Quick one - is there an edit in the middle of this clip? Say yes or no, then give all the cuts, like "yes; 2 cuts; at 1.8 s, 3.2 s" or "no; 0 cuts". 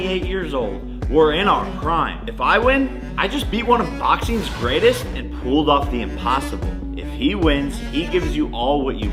no; 0 cuts